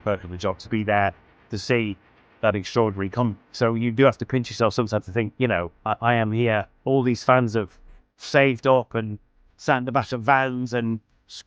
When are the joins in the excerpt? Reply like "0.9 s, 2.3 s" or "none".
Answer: 6.7 s